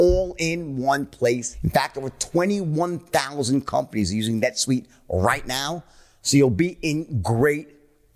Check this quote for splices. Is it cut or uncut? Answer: cut